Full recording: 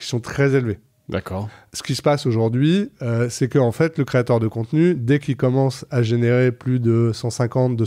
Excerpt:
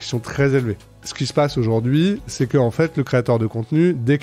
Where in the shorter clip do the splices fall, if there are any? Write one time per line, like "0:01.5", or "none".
0:00.9
0:02.3